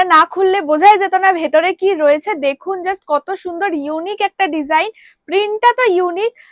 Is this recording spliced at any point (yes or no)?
no